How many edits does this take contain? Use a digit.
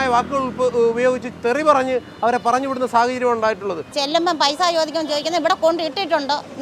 1